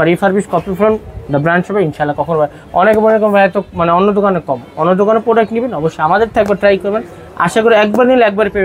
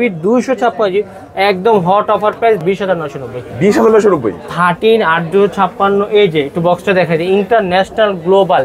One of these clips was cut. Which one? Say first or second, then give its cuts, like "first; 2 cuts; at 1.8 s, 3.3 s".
second; 1 cut; at 2.6 s